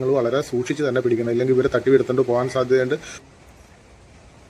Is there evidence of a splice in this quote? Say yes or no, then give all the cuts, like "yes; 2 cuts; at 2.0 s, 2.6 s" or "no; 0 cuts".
yes; 1 cut; at 3.2 s